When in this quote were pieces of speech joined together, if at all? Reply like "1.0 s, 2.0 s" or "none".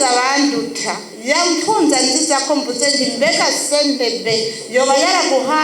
none